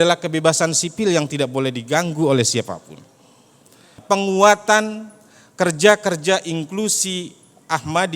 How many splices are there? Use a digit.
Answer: 1